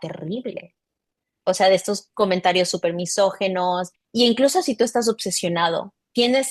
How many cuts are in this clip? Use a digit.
1